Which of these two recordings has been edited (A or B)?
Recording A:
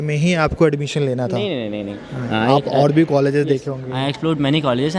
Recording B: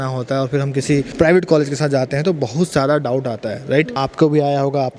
B